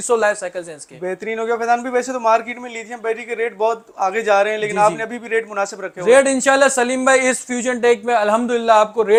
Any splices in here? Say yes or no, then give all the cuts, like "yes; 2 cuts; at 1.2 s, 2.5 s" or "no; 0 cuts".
no; 0 cuts